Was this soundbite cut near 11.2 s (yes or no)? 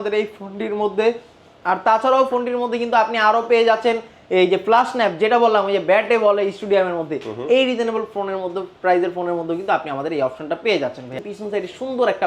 yes